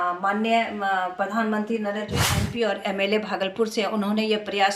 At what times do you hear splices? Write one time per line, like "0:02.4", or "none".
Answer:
0:02.4